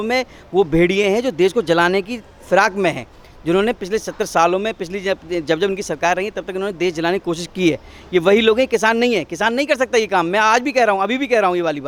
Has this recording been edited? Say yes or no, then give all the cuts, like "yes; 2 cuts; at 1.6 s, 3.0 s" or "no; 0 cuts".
no; 0 cuts